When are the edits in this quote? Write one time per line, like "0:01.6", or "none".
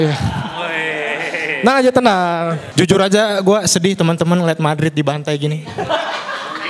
0:02.6